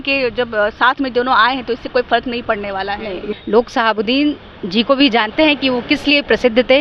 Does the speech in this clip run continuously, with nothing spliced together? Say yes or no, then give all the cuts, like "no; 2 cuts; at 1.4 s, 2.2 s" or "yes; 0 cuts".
no; 1 cut; at 3.2 s